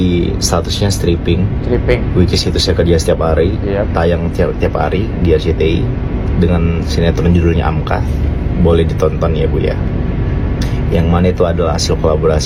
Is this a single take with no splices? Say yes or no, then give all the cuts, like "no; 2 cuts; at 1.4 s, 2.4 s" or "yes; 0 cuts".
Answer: yes; 0 cuts